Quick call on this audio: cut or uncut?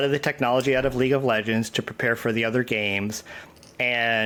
uncut